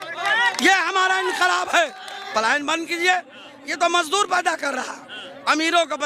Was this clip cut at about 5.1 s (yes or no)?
no